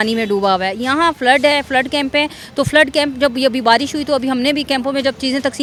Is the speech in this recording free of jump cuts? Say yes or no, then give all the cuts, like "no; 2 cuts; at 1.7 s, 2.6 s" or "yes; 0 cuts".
yes; 0 cuts